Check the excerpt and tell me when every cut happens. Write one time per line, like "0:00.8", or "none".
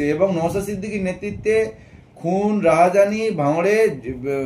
none